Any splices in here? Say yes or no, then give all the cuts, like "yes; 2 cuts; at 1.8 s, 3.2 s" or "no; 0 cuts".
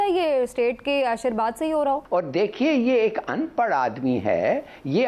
yes; 1 cut; at 2.0 s